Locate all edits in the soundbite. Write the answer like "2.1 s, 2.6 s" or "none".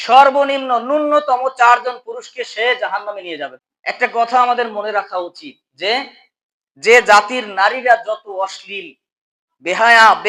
3.5 s